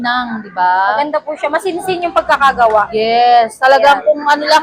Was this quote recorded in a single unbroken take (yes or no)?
yes